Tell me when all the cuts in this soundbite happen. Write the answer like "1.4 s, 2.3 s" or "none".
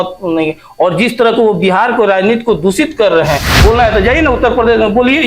3.5 s